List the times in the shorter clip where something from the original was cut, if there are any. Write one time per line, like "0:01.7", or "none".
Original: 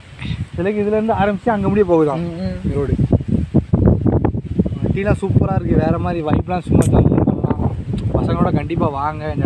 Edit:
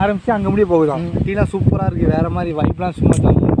0:01.1